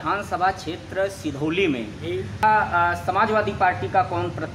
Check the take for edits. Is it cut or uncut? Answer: cut